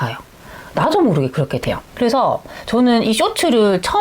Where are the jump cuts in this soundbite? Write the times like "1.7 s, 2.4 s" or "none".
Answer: 1.8 s